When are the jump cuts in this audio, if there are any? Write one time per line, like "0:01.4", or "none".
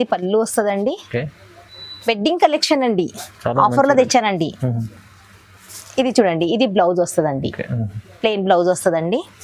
none